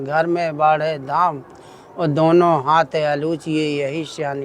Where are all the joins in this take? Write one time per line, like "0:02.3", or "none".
none

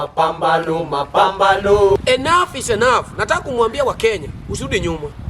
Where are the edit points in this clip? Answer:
0:02.0

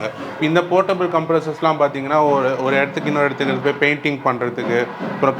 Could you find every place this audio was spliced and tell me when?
none

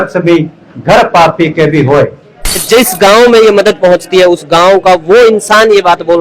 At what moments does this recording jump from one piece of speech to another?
0:02.6

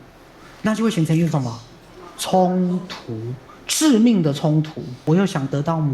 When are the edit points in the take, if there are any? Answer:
0:05.0

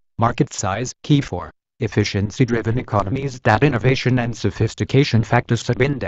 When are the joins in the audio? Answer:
0:01.0

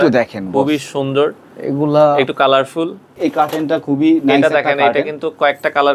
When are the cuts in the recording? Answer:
0:03.1

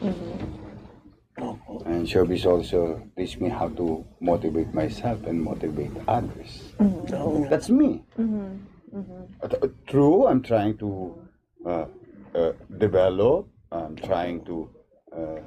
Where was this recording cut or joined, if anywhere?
0:07.5

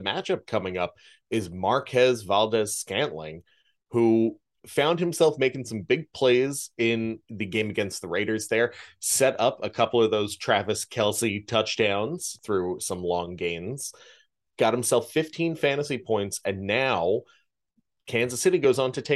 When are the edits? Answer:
0:04.6
0:07.2
0:12.4

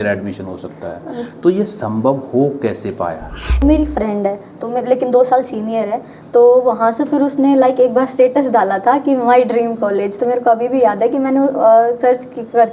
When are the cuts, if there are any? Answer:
0:03.6

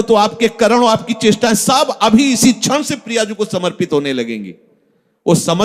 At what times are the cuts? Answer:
none

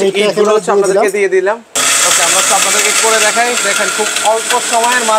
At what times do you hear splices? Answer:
0:01.8

